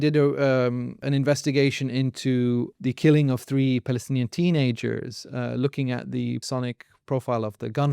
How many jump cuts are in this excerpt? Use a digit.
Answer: 3